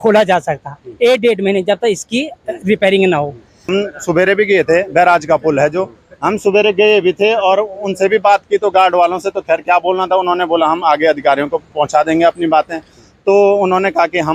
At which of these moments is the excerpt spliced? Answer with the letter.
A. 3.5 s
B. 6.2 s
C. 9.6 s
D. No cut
A